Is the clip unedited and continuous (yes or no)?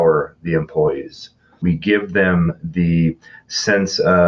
yes